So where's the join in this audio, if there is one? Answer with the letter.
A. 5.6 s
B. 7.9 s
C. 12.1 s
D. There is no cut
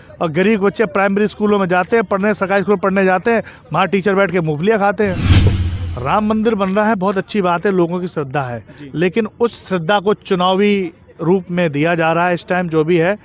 A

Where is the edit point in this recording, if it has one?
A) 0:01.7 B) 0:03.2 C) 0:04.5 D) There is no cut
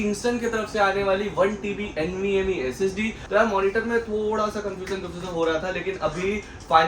B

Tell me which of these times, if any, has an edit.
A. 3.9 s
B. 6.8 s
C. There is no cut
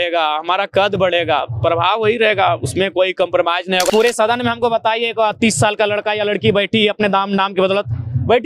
A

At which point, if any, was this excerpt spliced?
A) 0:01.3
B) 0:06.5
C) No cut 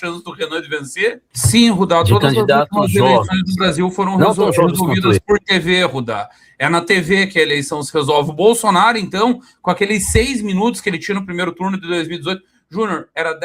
A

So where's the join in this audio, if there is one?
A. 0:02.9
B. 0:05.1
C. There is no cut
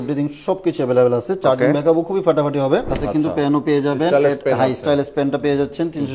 A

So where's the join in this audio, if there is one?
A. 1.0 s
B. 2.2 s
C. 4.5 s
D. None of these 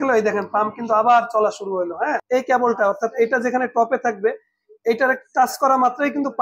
B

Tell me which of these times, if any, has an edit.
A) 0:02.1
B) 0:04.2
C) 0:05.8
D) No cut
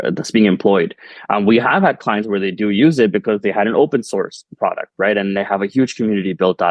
D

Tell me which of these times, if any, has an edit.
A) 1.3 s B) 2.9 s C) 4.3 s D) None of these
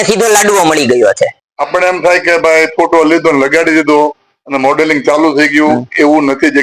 A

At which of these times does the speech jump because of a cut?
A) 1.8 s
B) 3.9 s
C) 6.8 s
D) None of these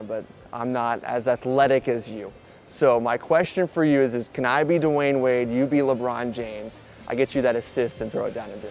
D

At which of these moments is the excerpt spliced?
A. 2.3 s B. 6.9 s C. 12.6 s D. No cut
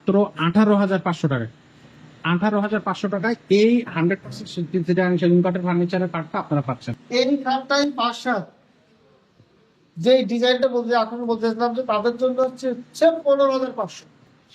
B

